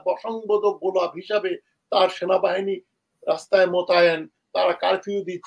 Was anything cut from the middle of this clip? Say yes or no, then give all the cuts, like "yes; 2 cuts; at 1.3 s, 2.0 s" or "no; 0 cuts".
no; 0 cuts